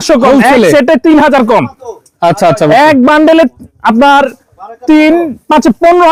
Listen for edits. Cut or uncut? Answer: uncut